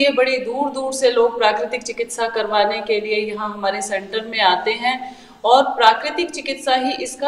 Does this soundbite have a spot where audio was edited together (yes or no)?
no